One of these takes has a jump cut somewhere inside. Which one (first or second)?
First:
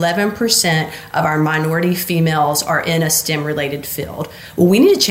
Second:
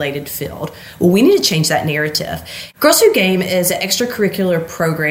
second